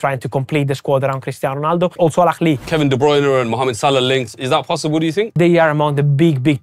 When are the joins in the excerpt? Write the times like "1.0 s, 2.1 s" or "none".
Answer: 1.9 s, 2.7 s, 5.4 s